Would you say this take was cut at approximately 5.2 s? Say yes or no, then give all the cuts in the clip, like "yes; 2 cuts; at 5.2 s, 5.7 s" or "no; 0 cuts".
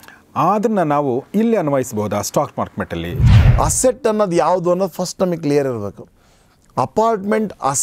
no; 1 cut; at 3.2 s